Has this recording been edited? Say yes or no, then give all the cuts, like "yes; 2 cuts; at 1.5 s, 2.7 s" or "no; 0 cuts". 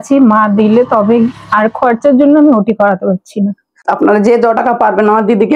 yes; 1 cut; at 3.7 s